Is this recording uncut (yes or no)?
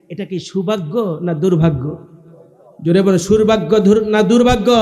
yes